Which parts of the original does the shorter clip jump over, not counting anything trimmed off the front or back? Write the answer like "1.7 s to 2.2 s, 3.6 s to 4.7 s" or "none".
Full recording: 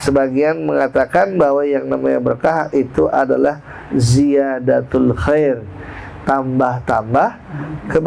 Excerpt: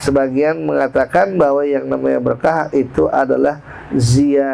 none